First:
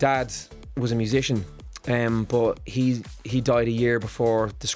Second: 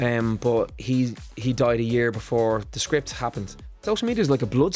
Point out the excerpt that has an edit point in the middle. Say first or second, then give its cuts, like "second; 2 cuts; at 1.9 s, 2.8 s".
second; 1 cut; at 3.8 s